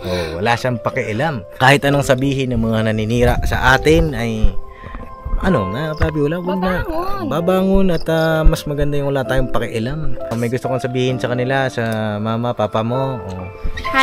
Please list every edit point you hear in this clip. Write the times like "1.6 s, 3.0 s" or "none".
1.5 s, 10.3 s